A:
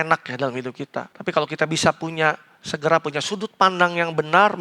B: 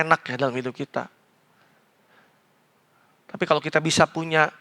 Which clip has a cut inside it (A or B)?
A